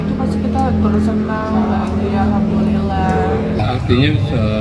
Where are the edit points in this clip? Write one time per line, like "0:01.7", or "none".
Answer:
none